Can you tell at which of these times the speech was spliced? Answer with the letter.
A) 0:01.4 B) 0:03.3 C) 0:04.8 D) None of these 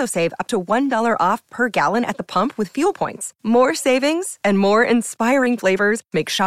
D